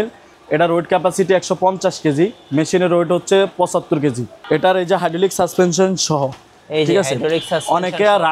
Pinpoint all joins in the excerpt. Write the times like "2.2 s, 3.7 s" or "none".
4.3 s